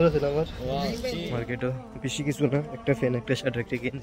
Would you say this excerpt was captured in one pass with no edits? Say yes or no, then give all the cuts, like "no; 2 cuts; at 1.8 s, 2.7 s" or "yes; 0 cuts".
no; 1 cut; at 1.3 s